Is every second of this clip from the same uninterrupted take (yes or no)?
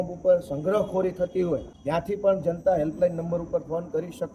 no